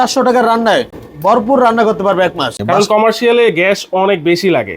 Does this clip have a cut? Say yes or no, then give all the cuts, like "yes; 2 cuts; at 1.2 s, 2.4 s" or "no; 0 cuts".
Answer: yes; 2 cuts; at 1.0 s, 2.6 s